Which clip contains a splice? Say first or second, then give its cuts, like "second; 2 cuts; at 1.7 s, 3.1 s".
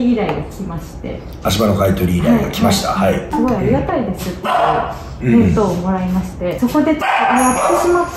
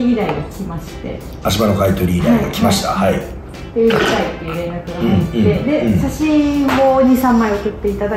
first; 2 cuts; at 3.3 s, 6.5 s